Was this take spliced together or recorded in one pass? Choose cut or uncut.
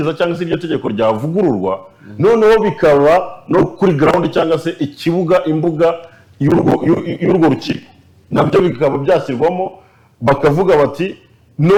uncut